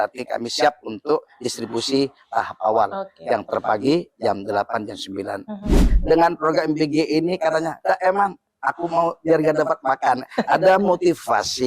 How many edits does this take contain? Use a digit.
1